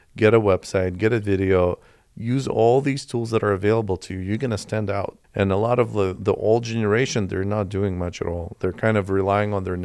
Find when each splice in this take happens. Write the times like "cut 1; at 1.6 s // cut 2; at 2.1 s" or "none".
cut 1; at 5.2 s